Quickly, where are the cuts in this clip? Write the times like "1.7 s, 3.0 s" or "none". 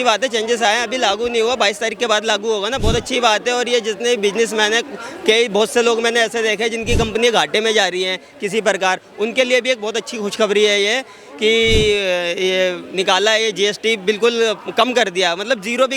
none